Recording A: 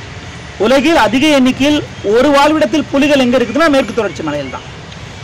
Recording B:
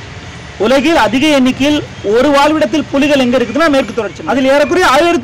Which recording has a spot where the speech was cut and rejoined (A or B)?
B